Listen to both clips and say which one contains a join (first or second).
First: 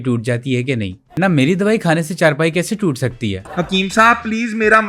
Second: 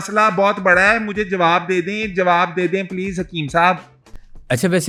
first